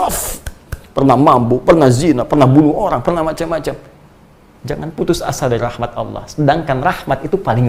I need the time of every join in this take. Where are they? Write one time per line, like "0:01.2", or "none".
none